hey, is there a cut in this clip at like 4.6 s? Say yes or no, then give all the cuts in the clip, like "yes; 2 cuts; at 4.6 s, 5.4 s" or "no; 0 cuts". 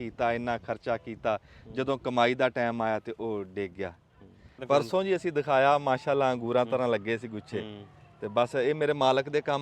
yes; 1 cut; at 4.6 s